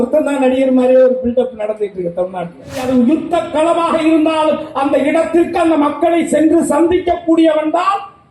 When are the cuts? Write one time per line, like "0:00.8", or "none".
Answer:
0:02.8

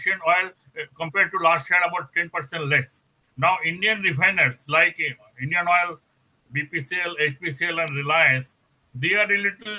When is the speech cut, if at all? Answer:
none

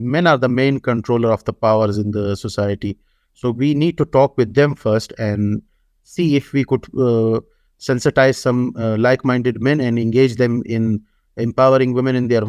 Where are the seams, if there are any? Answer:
none

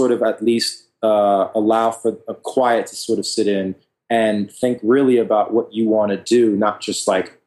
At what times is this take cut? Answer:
none

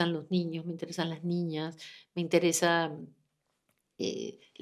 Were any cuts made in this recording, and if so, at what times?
none

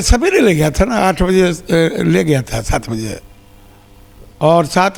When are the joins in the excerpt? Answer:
none

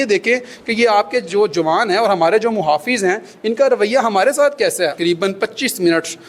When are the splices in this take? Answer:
0:05.0

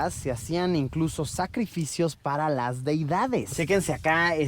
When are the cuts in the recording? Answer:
0:03.5

